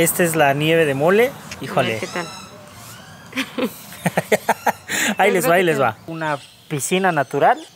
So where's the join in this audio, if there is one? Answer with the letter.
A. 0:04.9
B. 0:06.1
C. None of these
B